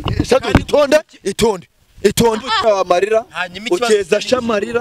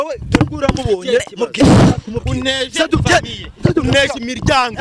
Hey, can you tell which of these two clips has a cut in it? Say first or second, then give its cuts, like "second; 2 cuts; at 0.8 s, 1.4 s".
first; 1 cut; at 2.6 s